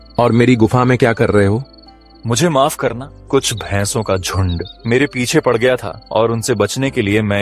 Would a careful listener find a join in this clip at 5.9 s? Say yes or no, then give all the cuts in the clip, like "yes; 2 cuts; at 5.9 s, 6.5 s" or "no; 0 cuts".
yes; 3 cuts; at 3.1 s, 4.7 s, 5.9 s